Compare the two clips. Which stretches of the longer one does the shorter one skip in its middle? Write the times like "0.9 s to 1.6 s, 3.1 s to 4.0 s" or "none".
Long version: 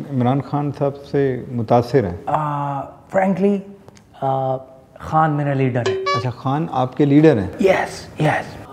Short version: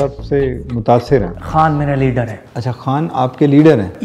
2.2 s to 4.9 s